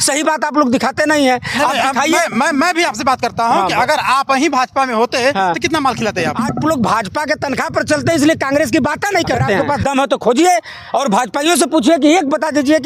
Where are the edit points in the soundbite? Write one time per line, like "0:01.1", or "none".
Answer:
0:06.6
0:09.6